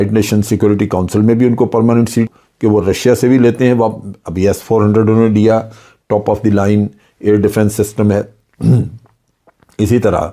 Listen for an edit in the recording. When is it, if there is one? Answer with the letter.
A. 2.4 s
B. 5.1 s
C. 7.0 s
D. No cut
A